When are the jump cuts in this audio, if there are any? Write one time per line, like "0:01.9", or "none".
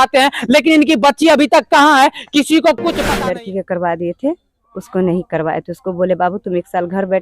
0:03.1

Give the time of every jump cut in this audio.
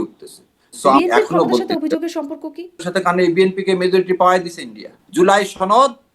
0:01.0
0:02.8
0:05.0

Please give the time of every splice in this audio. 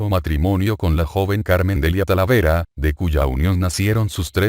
0:01.0

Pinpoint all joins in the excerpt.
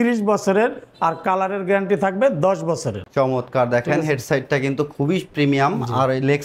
none

